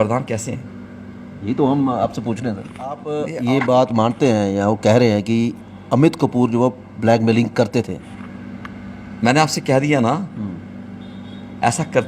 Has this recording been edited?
yes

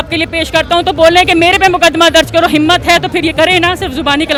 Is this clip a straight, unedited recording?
yes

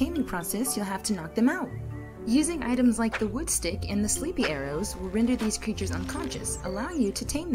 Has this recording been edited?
yes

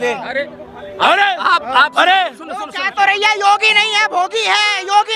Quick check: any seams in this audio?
no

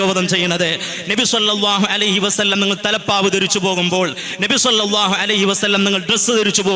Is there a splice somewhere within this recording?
no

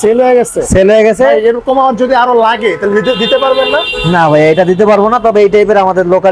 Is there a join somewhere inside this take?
no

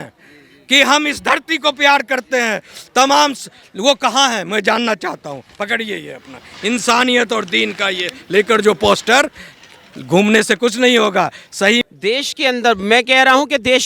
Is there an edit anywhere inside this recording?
yes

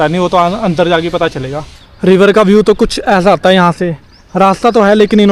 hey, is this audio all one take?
no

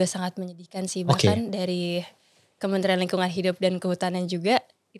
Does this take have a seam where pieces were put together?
no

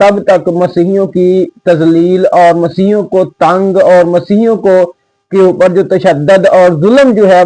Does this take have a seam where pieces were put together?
no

